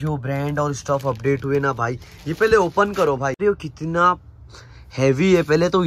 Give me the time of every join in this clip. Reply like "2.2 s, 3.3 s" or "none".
3.4 s

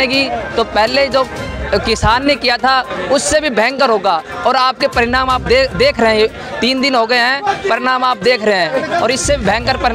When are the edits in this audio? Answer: none

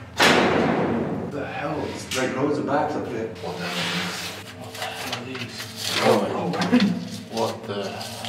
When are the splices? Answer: 1.3 s, 3.3 s, 4.4 s

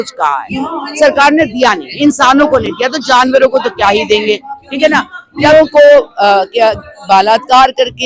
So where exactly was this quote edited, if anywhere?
5.5 s

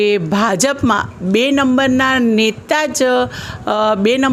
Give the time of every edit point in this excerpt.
none

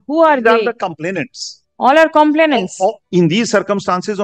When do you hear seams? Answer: 3.0 s

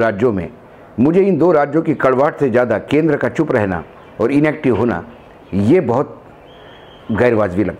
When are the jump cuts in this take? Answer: none

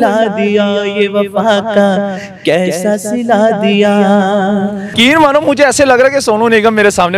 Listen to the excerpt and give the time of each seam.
4.9 s

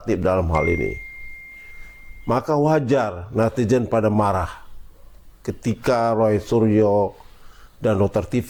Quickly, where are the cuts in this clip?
none

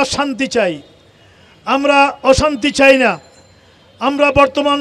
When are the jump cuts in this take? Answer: none

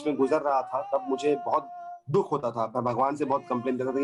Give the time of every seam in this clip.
none

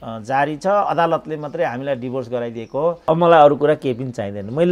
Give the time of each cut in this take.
3.0 s

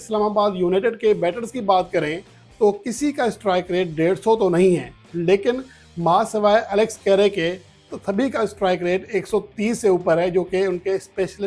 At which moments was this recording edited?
none

